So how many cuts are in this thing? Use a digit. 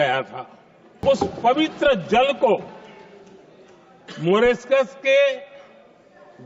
1